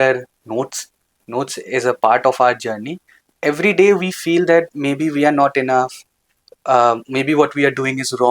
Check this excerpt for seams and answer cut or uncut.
cut